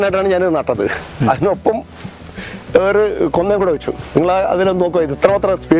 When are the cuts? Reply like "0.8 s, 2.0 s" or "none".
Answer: none